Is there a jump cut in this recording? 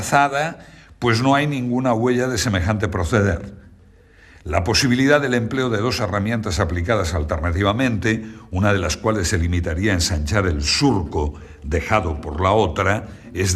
no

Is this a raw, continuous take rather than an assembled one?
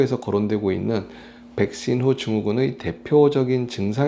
yes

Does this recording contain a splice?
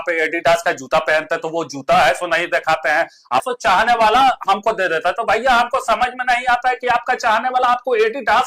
yes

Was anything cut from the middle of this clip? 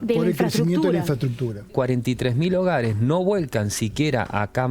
yes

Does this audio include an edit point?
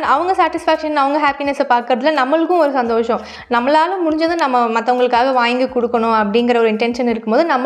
no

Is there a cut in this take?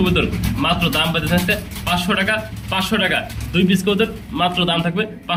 no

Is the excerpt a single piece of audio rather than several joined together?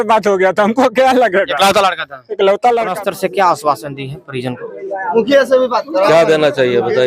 no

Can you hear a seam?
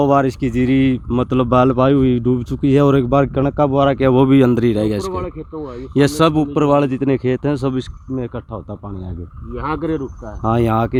no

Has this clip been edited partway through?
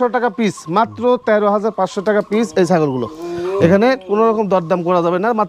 no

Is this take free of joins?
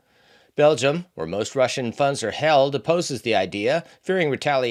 yes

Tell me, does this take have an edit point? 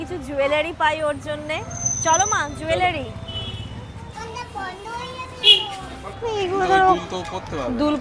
yes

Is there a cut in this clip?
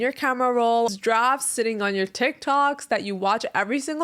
yes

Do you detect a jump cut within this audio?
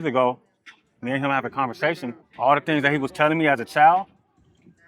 yes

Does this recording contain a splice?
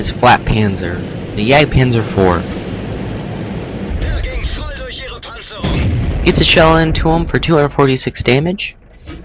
no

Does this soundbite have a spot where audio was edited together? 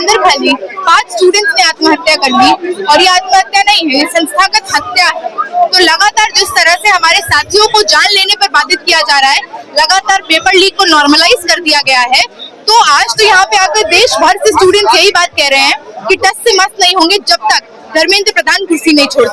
no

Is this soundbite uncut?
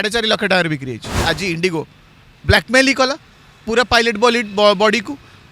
no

